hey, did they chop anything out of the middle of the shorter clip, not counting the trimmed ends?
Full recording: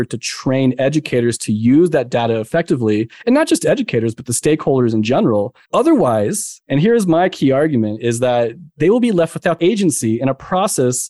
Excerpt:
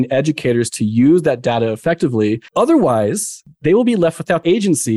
yes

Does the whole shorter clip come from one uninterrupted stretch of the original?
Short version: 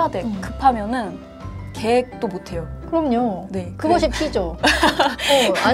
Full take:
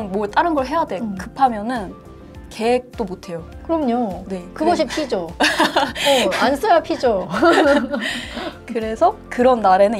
yes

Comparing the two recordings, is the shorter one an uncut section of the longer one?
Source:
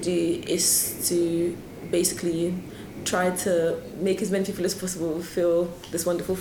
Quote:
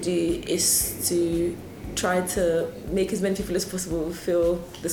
no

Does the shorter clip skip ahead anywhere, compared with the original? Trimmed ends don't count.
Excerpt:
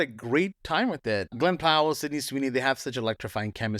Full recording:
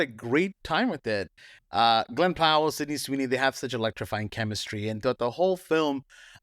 yes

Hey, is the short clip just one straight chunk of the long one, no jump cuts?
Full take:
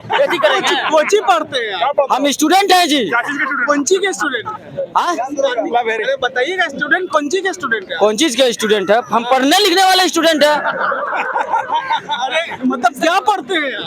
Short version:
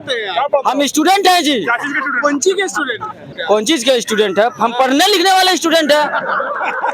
no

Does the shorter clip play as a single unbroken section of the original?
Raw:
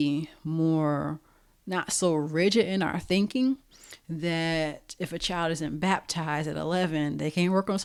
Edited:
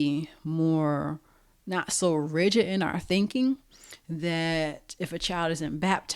yes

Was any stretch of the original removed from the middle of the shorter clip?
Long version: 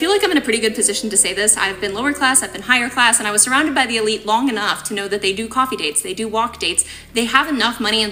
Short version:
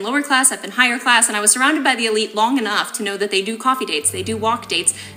no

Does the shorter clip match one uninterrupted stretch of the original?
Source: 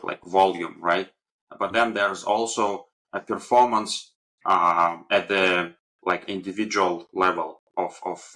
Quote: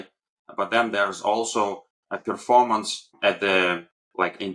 no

